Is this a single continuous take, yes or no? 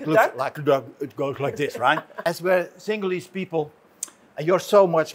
no